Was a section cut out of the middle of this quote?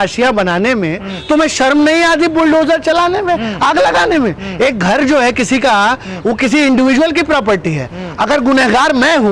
no; 0 cuts

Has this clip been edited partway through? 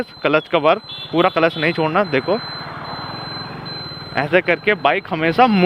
no; 0 cuts

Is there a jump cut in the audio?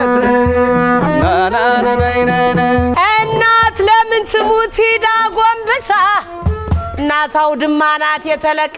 yes; 1 cut; at 2.9 s

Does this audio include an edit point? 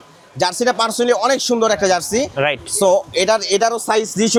no; 0 cuts

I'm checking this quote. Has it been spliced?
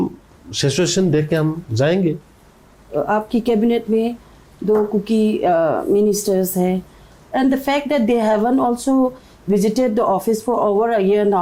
no; 0 cuts

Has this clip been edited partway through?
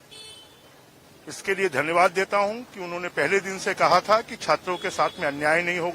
no; 0 cuts

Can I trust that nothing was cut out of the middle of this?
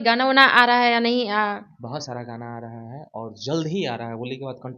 yes; 0 cuts

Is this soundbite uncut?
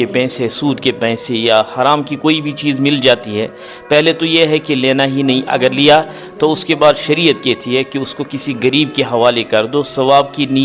yes; 0 cuts

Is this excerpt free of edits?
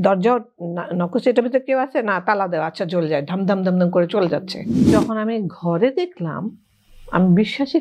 no; 1 cut; at 4.8 s

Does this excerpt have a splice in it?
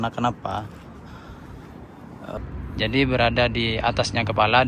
yes; 1 cut; at 2.4 s

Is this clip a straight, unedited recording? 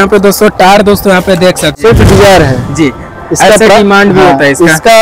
no; 1 cut; at 1.7 s

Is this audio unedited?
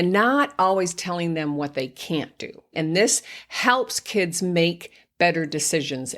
no; 1 cut; at 2.7 s

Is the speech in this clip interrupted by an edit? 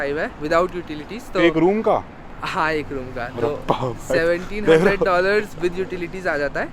no; 0 cuts

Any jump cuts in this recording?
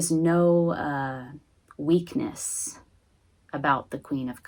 no; 0 cuts

